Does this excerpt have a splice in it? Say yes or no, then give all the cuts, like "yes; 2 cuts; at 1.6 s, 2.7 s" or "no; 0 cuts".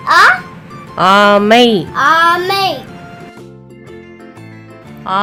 no; 0 cuts